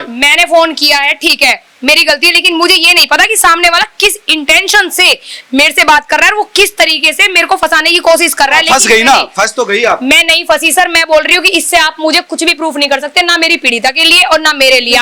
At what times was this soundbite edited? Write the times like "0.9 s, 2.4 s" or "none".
none